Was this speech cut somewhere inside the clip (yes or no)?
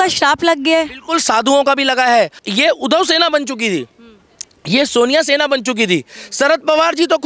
yes